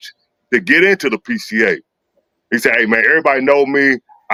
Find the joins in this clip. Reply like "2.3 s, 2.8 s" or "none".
none